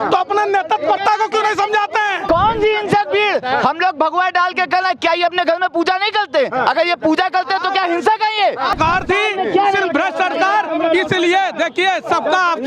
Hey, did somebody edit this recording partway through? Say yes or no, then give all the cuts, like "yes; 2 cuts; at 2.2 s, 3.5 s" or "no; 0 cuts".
yes; 2 cuts; at 2.3 s, 8.7 s